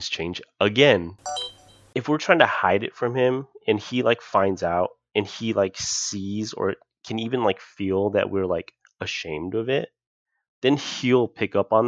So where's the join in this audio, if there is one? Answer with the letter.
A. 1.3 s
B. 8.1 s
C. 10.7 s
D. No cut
A